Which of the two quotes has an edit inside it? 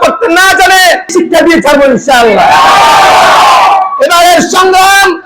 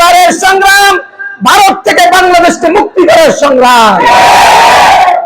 first; 1 cut; at 1.1 s

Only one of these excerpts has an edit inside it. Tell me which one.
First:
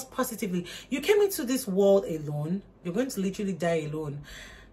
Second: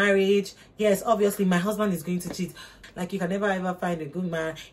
second; 1 cut; at 2.8 s

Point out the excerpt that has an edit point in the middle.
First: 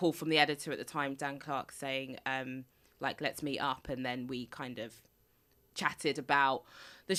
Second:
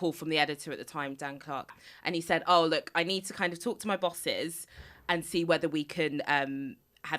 second; 1 cut; at 1.8 s

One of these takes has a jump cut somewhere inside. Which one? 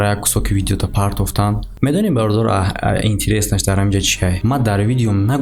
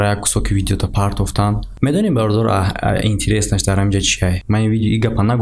second; 1 cut; at 4.4 s

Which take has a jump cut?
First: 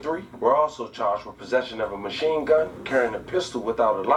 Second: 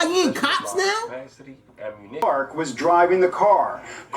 second; 1 cut; at 2.2 s

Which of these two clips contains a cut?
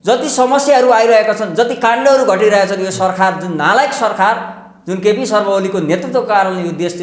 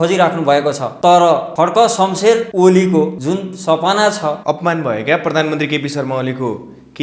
second; 5 cuts; at 0.9 s, 1.5 s, 2.5 s, 3.2 s, 4.4 s

